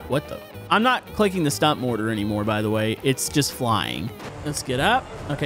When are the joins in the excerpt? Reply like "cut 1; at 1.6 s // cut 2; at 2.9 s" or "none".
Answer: cut 1; at 4.4 s